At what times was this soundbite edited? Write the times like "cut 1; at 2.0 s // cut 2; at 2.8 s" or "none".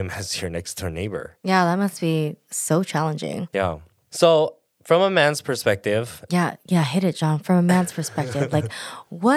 cut 1; at 1.3 s // cut 2; at 2.4 s // cut 3; at 3.6 s